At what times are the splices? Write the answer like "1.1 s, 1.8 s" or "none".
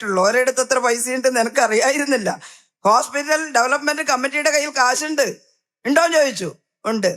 none